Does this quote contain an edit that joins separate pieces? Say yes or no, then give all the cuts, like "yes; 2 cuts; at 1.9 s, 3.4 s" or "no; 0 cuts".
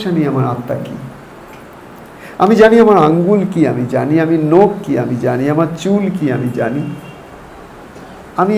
no; 0 cuts